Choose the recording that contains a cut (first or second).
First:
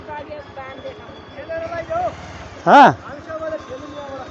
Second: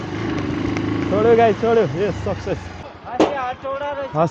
second